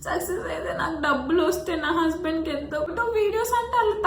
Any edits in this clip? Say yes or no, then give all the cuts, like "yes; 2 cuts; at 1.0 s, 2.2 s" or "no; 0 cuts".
yes; 1 cut; at 2.9 s